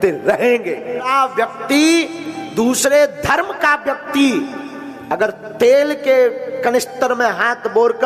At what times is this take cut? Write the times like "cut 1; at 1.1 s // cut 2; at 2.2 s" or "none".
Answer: cut 1; at 1.1 s